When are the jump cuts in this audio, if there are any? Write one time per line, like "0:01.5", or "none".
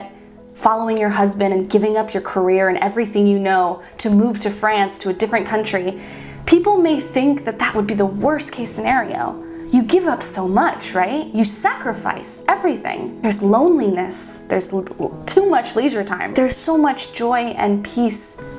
0:13.1
0:16.3